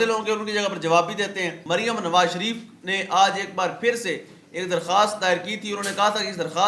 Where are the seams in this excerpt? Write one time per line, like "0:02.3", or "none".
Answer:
0:01.5